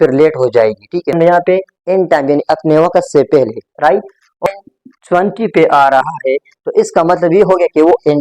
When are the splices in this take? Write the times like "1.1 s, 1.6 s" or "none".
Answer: 1.1 s, 4.5 s